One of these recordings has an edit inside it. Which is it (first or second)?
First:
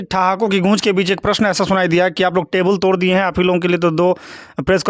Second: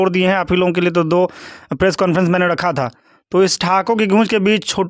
second